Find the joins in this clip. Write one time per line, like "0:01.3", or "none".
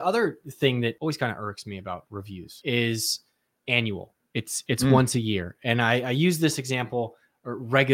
0:01.0
0:02.6

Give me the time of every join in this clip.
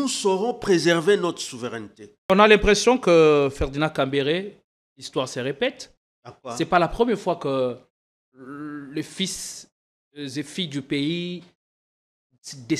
0:02.3

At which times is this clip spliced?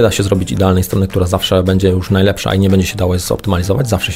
none

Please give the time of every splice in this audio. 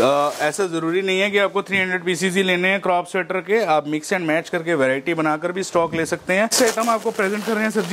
0:06.5

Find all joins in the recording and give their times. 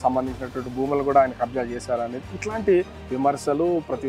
none

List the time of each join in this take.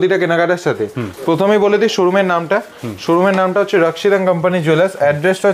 none

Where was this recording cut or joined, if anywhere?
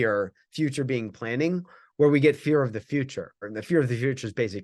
0:03.5

